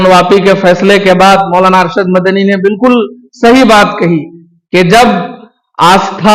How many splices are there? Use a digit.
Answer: 0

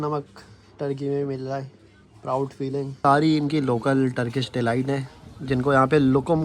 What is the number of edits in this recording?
1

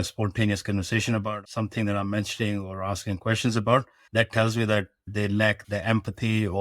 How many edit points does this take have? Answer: 3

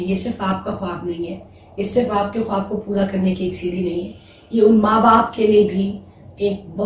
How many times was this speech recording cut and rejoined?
0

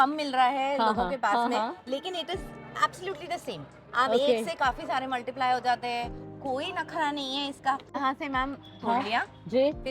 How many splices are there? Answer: 1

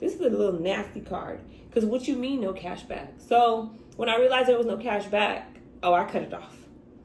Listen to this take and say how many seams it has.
0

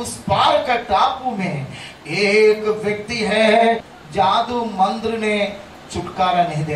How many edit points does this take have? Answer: 1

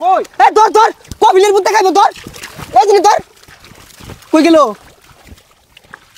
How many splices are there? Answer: 0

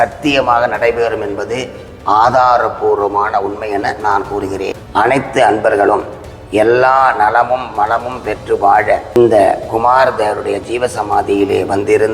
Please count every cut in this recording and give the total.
2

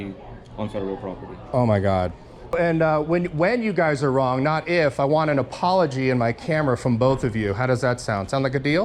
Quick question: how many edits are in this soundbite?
1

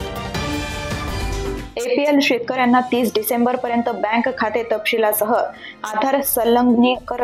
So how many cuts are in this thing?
1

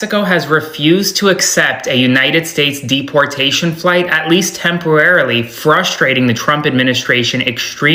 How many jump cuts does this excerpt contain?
0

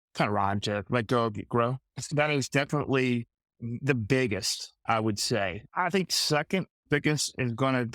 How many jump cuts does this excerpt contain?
2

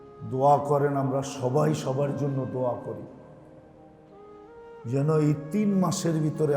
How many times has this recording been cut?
2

